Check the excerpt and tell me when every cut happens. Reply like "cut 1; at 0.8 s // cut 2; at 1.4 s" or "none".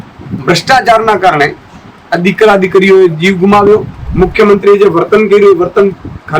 cut 1; at 4.0 s